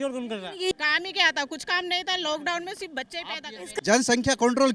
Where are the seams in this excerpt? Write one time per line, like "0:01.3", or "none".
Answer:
0:00.7
0:03.7